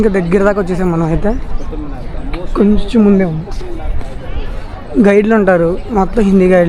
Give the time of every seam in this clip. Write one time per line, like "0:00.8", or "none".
none